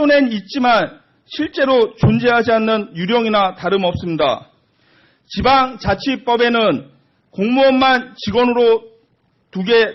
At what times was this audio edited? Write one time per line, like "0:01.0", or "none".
none

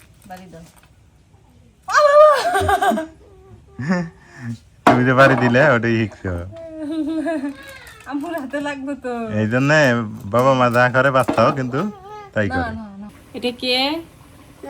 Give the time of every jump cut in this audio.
0:13.3

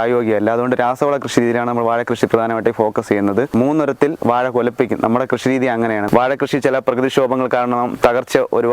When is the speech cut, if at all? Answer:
0:03.5
0:06.1

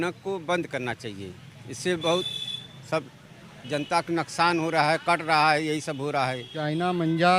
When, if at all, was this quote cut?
0:06.5

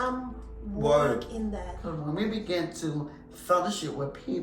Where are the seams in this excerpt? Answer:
0:01.9

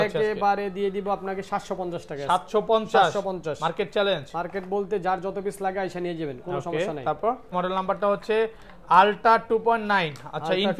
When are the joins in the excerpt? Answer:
none

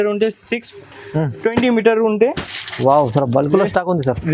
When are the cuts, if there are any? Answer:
0:02.4

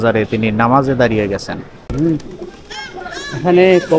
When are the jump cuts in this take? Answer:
0:01.8

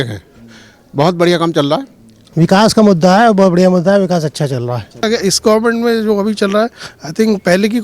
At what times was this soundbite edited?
0:02.2
0:05.0

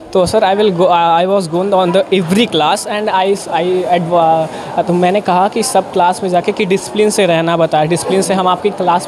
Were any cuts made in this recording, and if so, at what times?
none

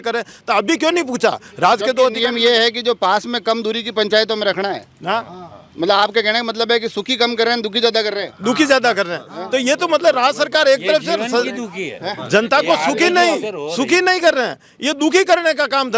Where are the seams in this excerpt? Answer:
none

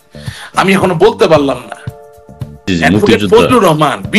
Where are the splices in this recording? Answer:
0:02.7

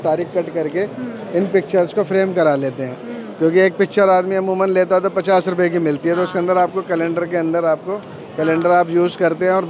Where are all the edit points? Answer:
none

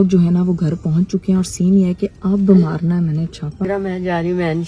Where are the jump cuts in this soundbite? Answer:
0:03.6

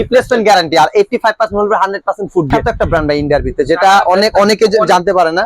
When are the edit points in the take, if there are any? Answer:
0:02.5

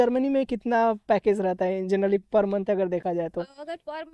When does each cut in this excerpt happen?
none

